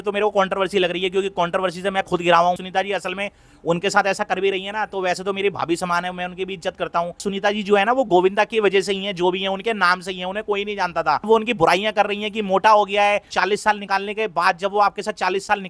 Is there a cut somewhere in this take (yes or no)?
yes